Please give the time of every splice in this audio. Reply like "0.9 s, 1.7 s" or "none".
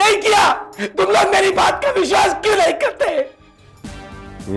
none